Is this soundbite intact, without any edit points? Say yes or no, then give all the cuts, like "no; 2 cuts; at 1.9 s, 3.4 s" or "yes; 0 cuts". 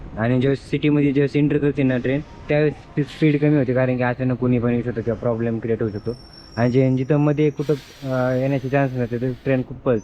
yes; 0 cuts